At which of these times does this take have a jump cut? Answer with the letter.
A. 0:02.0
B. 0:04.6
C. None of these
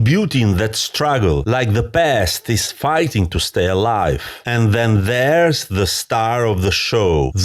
C